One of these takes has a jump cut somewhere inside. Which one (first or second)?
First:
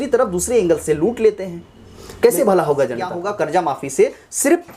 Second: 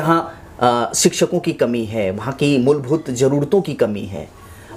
first